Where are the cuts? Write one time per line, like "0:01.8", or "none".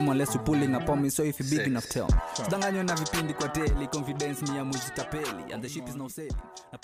none